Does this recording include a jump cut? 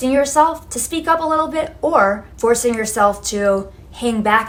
no; 0 cuts

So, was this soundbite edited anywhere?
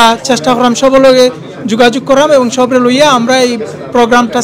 no; 0 cuts

